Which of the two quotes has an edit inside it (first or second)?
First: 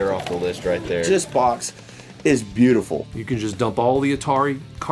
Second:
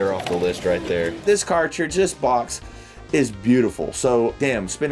first